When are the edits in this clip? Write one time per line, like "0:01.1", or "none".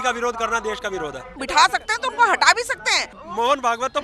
0:01.4
0:03.2